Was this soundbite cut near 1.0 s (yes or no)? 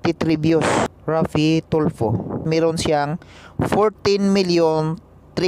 yes